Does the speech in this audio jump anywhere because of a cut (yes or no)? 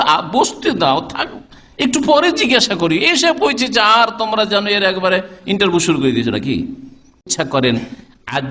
yes